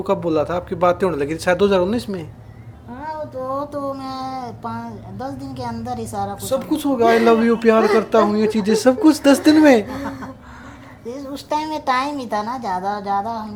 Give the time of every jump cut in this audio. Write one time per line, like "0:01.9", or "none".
none